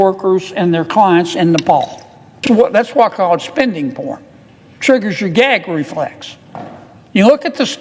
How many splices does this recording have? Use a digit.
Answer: 1